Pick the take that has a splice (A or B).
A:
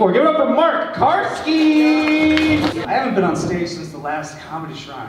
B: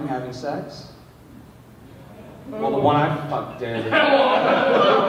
A